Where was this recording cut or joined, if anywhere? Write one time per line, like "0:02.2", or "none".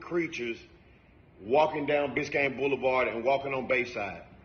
none